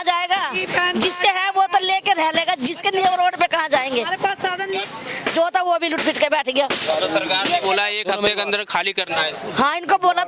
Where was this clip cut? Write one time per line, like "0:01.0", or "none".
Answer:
0:04.9